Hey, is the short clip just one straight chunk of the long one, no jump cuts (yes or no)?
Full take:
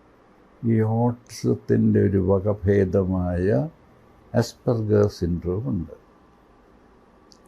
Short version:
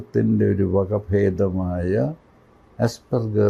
yes